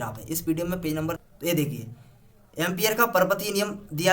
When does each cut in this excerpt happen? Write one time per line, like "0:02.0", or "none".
0:01.2